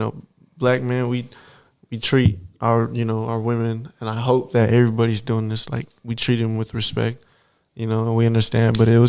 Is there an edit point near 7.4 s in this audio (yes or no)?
no